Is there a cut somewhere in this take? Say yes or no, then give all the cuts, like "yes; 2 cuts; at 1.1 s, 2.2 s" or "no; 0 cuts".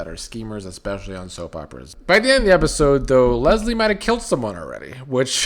yes; 1 cut; at 1.9 s